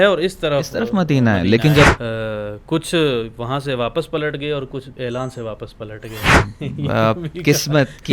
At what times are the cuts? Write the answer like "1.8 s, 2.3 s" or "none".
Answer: 1.9 s